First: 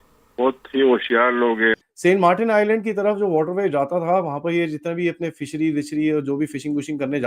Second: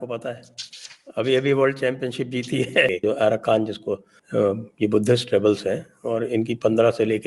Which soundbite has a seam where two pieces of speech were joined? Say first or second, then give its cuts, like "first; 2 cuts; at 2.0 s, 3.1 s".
second; 1 cut; at 2.9 s